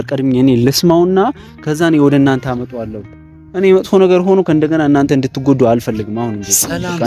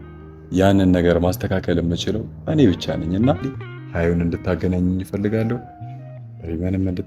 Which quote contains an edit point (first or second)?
second